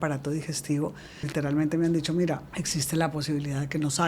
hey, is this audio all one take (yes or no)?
no